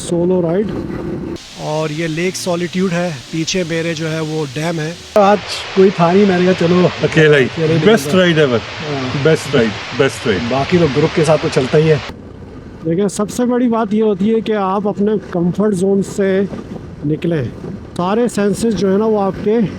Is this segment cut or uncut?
cut